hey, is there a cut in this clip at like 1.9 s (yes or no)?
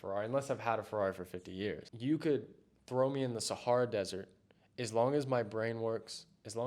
yes